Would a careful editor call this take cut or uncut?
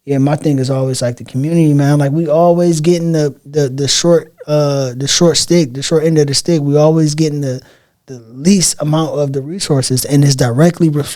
uncut